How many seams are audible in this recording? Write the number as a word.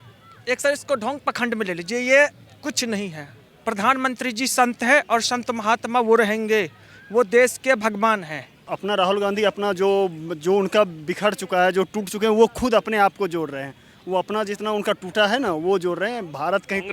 one